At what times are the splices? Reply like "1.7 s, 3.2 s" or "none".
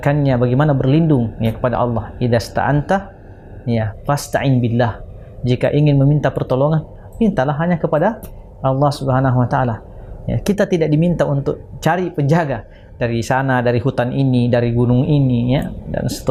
none

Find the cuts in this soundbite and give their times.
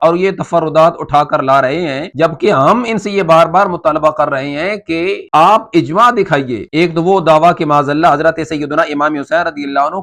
none

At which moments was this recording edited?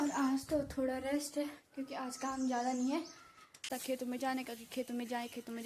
3.7 s

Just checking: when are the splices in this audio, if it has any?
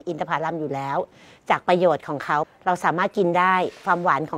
2.5 s

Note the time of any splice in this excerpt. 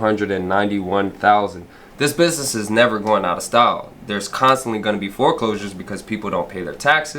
1.8 s

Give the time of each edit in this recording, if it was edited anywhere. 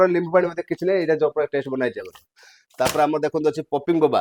none

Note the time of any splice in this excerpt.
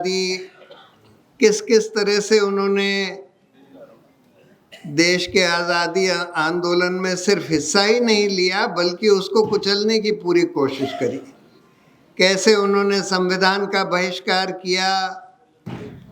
none

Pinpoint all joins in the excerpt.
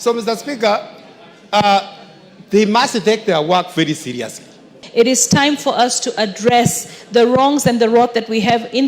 4.8 s

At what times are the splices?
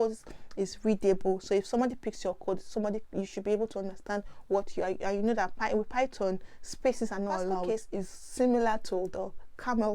7.6 s

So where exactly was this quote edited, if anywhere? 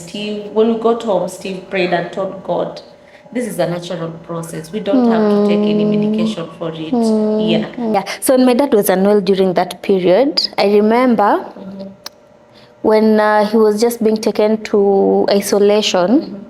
8.0 s

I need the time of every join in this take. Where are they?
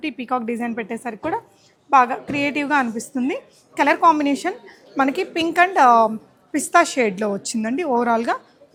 none

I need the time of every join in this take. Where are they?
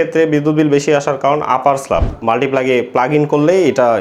2.1 s

